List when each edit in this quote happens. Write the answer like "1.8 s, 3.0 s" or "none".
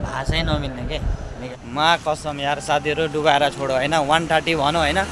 1.5 s